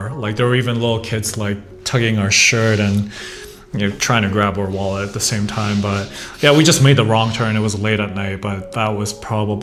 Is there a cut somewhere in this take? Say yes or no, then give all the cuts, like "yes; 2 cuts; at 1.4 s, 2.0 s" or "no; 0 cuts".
no; 0 cuts